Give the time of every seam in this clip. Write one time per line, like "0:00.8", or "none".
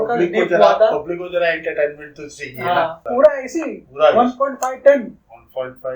0:03.0